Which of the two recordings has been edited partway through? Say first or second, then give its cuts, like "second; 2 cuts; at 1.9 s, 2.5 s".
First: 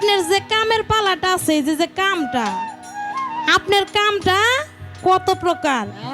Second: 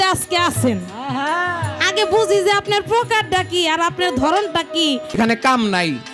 second; 1 cut; at 5.2 s